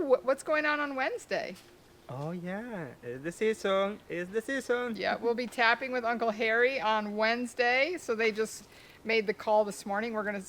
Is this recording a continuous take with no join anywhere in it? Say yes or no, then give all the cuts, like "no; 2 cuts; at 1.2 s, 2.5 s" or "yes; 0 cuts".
yes; 0 cuts